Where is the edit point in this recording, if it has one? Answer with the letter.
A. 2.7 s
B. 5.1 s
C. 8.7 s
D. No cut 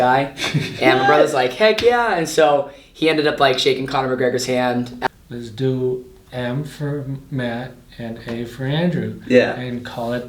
B